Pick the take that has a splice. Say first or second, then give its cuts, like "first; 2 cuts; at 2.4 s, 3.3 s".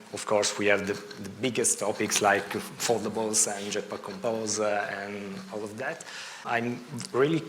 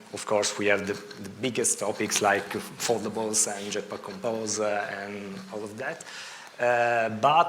first; 1 cut; at 6.4 s